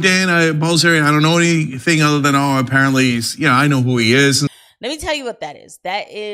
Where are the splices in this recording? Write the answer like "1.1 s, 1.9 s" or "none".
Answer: 4.5 s